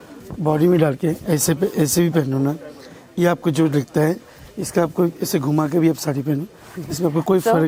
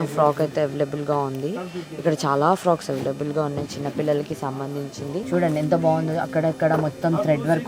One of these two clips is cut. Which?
second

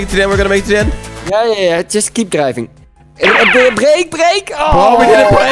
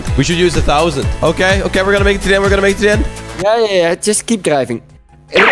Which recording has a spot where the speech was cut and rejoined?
second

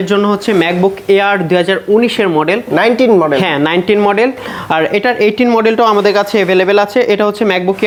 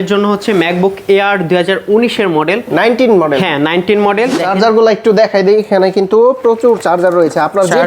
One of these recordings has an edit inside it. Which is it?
second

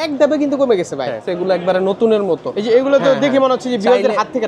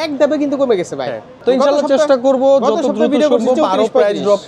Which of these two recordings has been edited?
first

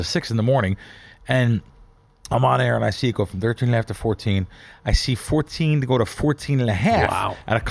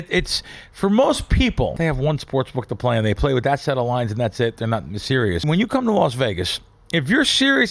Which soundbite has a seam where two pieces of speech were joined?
second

